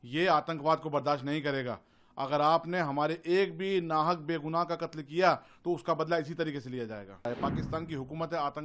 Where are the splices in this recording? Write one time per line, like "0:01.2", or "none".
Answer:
0:07.3